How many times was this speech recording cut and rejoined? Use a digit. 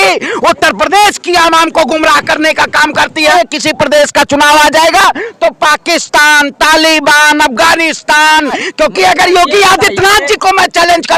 2